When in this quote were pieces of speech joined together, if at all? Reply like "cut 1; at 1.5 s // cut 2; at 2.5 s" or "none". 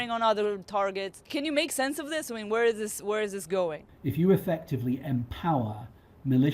cut 1; at 1.2 s // cut 2; at 3.9 s